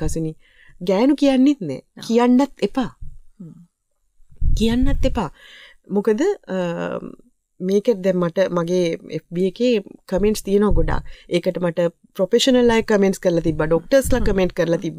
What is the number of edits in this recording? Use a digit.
0